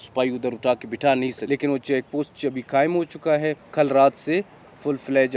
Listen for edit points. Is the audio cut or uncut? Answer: cut